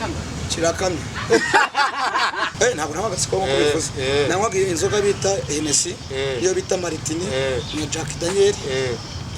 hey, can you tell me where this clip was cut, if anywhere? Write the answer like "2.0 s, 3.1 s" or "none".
2.5 s